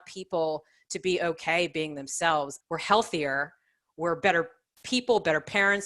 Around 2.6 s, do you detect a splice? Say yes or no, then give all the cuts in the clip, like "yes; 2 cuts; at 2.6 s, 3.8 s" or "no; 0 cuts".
yes; 1 cut; at 2.6 s